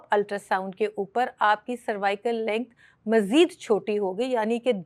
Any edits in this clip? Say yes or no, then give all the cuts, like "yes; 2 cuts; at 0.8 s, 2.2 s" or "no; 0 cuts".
no; 0 cuts